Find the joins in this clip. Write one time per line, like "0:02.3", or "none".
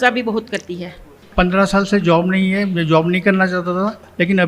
0:01.2